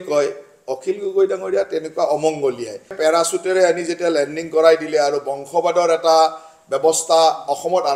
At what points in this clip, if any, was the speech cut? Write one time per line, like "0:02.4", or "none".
0:03.0

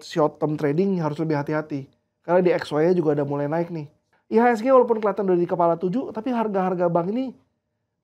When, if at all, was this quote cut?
0:04.1

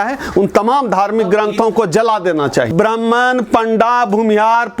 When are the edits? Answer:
0:02.7

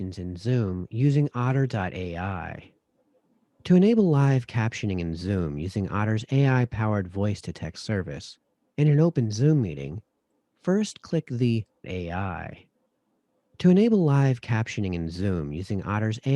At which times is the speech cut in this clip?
0:11.9

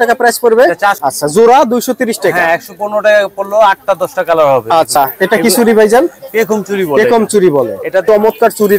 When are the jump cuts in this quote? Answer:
0:01.0
0:04.9
0:08.0

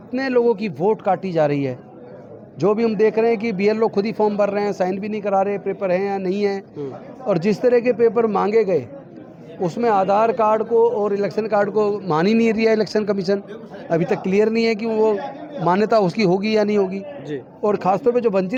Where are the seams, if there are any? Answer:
none

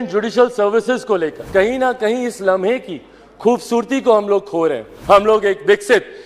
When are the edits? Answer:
0:01.4
0:04.9

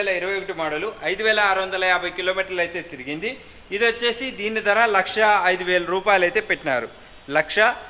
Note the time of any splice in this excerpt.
none

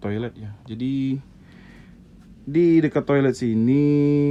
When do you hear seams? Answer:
none

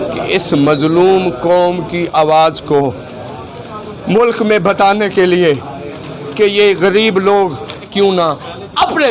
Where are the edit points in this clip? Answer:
0:07.9

